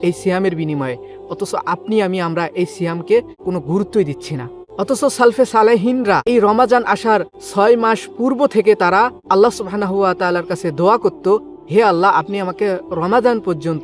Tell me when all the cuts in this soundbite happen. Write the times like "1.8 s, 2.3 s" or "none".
3.4 s, 4.6 s, 6.3 s, 7.4 s, 9.2 s